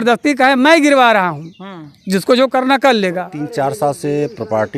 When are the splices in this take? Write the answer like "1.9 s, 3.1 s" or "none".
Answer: 3.4 s